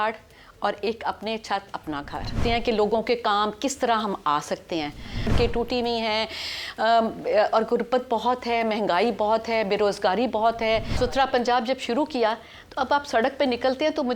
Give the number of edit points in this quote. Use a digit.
3